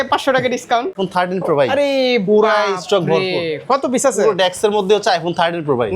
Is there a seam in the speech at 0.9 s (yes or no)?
yes